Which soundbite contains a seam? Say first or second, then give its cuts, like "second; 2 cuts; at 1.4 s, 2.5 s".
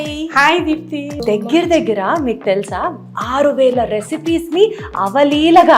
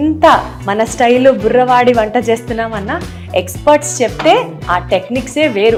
first; 1 cut; at 1.2 s